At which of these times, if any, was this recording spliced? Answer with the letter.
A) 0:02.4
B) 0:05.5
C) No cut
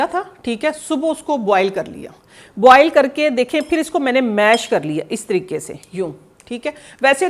C